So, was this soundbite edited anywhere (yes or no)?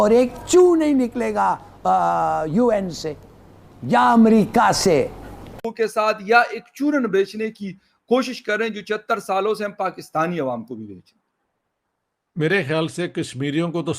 yes